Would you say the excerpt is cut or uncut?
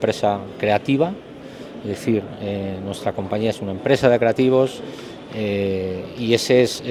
uncut